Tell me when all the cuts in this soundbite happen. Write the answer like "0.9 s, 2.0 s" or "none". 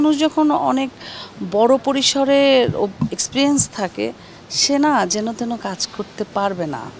none